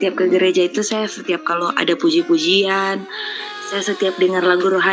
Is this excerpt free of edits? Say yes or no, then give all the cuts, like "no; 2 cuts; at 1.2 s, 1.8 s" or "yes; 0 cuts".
yes; 0 cuts